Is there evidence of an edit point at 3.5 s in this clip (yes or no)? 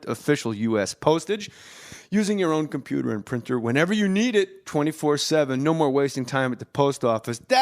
yes